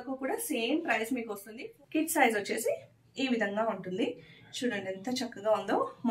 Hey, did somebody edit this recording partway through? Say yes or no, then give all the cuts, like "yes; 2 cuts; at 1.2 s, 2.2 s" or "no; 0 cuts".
yes; 1 cut; at 1.4 s